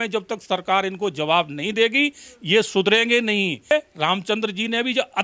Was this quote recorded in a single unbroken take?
no; 1 cut; at 3.7 s

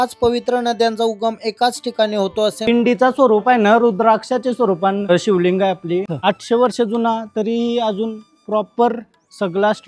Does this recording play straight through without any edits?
no; 2 cuts; at 2.6 s, 6.1 s

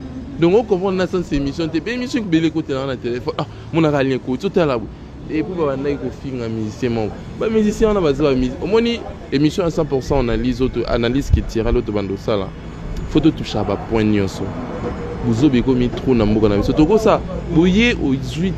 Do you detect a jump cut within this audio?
no; 0 cuts

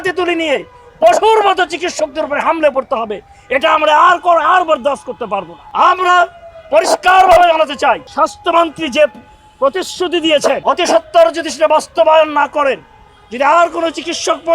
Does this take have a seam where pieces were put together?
yes; 3 cuts; at 5.6 s, 8.1 s, 10.6 s

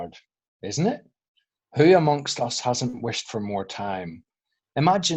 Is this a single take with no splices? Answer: yes; 0 cuts

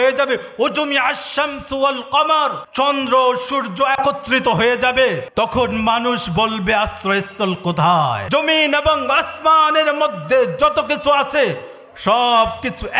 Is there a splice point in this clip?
yes; 3 cuts; at 2.6 s, 5.2 s, 8.2 s

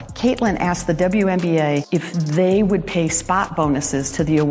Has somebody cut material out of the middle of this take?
no; 0 cuts

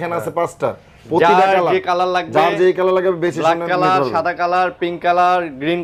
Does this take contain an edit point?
no; 0 cuts

